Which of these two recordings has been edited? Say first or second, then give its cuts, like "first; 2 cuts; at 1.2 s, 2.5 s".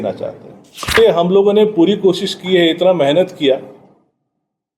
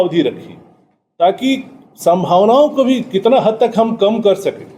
first; 1 cut; at 1.0 s